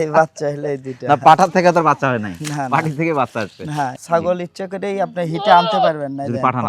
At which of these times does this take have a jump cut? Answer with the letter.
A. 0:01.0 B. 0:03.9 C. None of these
B